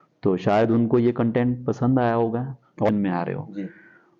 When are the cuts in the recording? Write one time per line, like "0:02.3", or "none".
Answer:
0:02.9